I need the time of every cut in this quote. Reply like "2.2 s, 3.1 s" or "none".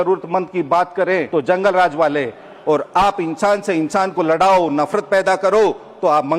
1.3 s